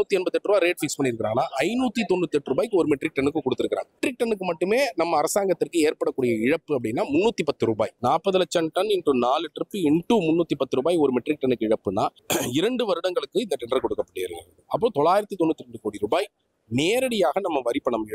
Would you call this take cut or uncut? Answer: cut